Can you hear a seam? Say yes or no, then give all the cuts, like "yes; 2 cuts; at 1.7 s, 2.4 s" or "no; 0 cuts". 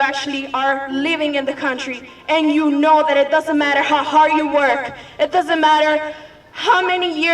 no; 0 cuts